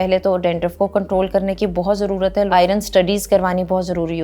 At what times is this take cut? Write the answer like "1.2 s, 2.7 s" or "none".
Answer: 2.5 s